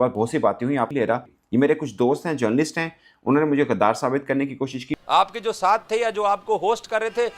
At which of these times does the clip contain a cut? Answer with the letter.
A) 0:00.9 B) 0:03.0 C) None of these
A